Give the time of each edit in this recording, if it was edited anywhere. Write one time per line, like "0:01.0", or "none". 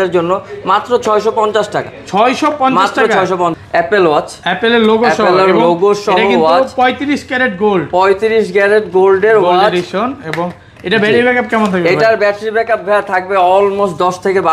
0:03.6

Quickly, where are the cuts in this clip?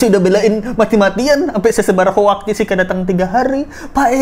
none

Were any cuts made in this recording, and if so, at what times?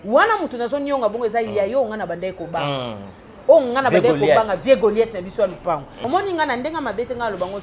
0:05.9

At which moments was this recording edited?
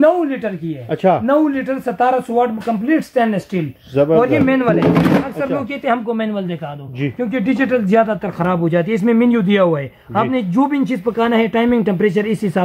none

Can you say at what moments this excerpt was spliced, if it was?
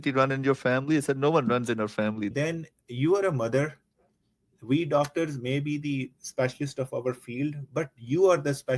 0:02.3

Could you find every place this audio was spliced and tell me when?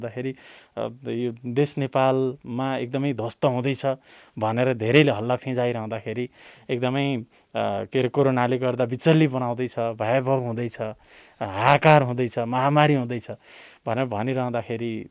none

